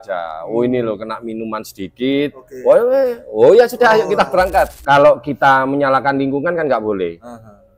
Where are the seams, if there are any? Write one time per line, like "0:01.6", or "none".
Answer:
0:04.8